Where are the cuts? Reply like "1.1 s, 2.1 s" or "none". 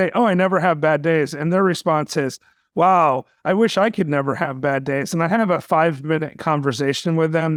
none